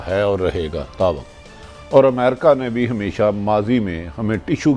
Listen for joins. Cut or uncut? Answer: uncut